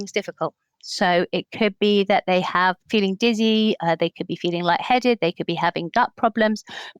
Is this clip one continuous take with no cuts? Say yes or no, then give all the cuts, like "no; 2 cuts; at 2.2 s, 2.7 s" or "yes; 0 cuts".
no; 2 cuts; at 2.8 s, 3.8 s